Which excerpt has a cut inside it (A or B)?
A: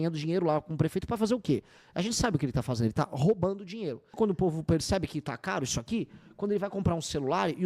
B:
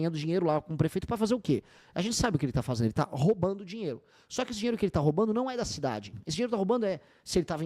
A